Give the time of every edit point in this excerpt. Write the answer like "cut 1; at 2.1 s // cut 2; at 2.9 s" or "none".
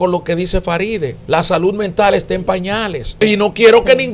cut 1; at 1.2 s // cut 2; at 3.2 s